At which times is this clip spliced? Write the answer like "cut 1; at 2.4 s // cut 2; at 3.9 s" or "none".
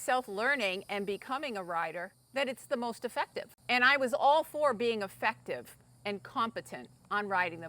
cut 1; at 2.1 s // cut 2; at 3.5 s